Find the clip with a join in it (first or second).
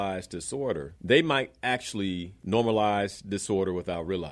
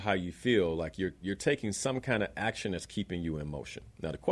first